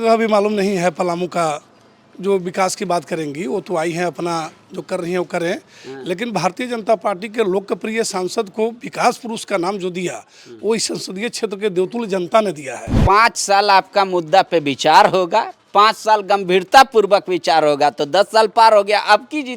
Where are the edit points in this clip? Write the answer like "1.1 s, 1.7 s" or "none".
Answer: 13.0 s